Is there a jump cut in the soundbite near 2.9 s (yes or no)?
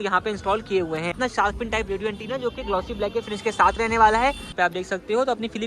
no